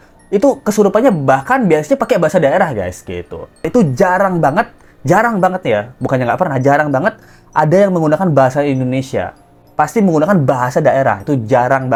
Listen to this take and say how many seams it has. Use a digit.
0